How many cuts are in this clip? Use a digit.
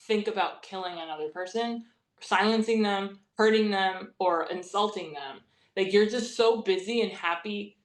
0